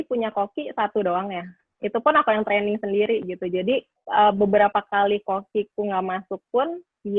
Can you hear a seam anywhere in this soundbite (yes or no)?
yes